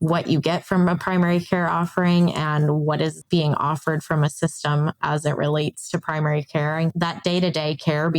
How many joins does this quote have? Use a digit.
1